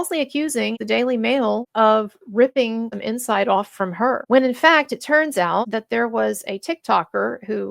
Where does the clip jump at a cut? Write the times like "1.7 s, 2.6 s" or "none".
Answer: 1.7 s, 3.0 s, 4.2 s, 5.7 s